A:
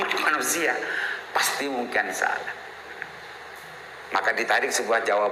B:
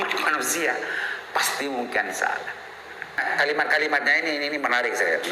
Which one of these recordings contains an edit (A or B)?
B